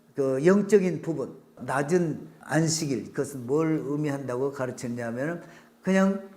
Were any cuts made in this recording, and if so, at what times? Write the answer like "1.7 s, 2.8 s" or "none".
1.6 s, 2.3 s